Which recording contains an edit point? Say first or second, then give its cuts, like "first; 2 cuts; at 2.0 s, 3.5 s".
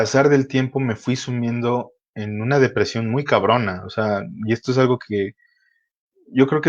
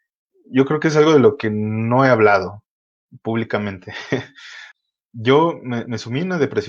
second; 1 cut; at 4.6 s